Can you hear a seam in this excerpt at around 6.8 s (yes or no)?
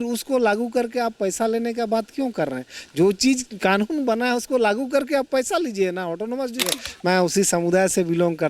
yes